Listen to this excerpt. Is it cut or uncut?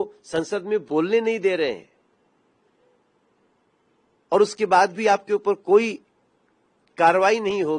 uncut